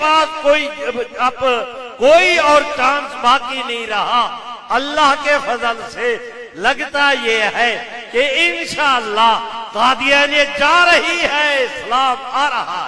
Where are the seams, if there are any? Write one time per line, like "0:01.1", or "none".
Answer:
none